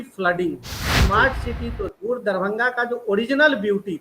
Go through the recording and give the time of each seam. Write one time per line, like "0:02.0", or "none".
0:01.0